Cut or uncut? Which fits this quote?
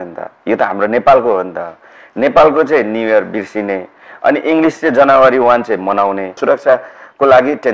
cut